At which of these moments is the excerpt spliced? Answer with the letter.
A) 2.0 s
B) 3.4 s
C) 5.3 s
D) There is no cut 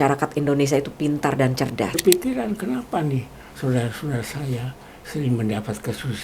A